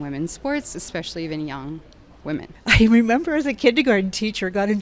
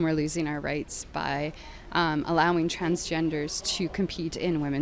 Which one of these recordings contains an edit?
first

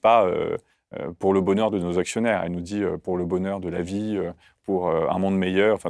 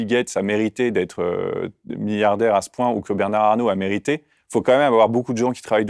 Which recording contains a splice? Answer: first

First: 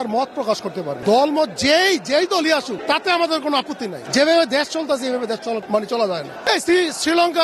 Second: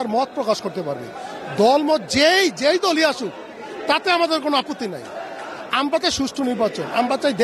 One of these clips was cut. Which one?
first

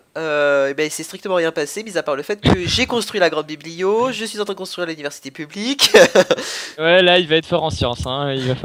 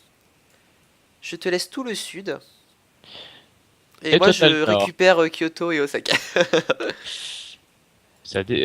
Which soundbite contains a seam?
second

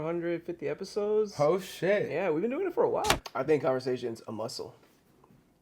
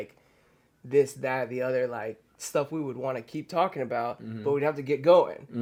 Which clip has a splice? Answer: first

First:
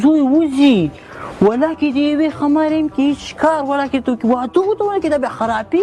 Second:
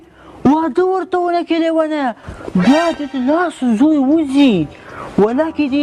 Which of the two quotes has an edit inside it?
first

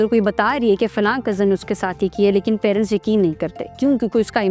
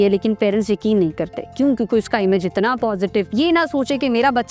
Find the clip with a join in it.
second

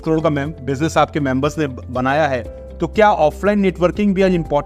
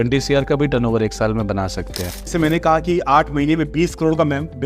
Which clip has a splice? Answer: second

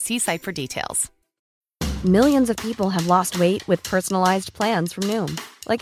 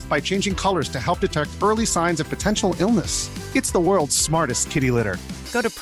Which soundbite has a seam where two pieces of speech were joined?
first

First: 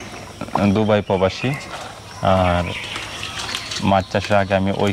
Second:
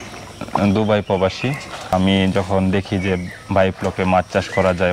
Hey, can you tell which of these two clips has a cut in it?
second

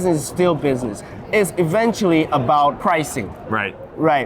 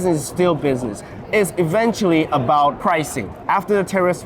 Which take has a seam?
second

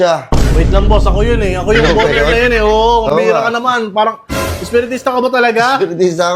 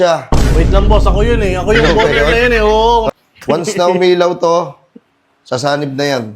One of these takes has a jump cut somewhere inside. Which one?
second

